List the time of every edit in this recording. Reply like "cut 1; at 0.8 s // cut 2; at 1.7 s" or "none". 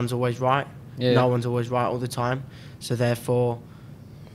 none